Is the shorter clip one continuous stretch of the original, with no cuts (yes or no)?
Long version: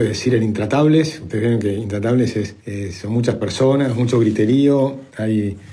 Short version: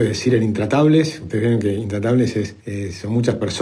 yes